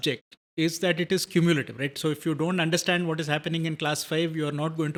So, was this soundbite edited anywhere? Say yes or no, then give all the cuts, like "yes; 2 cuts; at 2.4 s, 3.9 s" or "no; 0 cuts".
no; 0 cuts